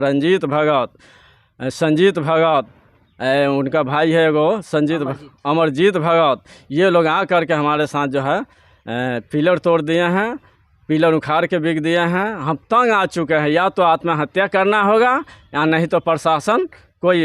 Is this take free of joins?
yes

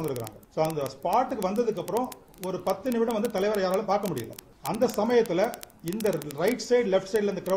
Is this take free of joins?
yes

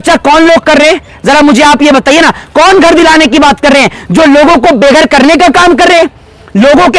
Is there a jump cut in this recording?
no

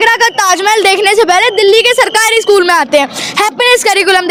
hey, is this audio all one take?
yes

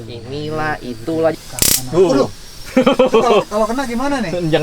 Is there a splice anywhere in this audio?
yes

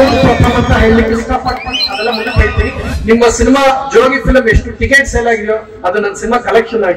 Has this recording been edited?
yes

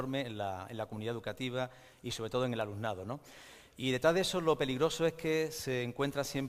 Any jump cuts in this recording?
yes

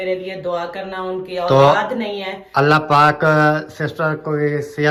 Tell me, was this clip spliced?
no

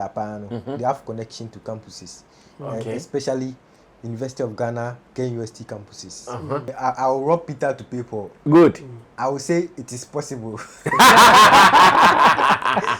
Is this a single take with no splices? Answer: no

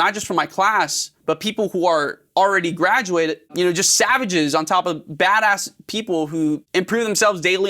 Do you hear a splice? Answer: yes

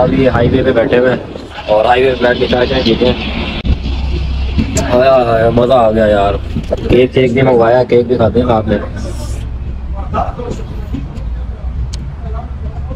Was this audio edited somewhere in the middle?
no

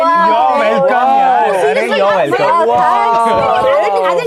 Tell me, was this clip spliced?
no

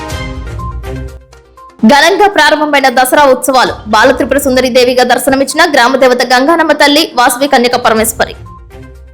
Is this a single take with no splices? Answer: no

